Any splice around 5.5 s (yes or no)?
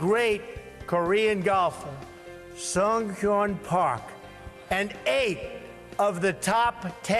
yes